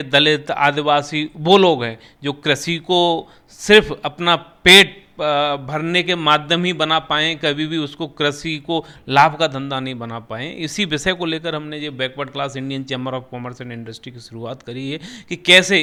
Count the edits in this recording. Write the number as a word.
zero